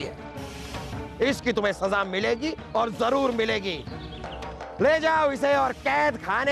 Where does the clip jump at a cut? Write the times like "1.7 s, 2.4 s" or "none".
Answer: none